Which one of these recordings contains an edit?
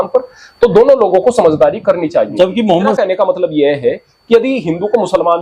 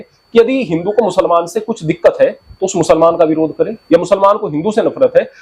first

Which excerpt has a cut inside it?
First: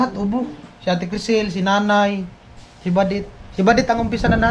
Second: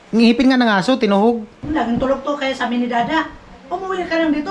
second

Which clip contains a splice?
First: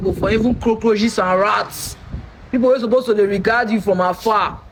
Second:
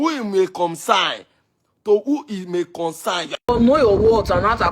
second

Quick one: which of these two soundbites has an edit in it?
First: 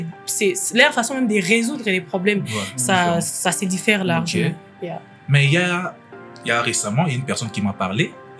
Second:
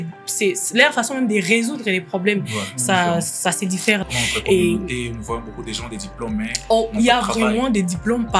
second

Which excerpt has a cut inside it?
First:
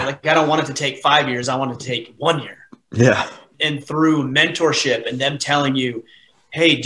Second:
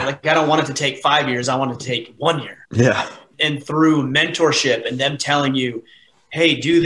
second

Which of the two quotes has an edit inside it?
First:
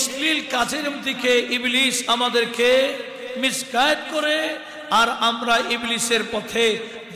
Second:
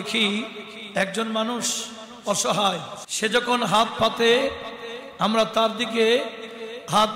second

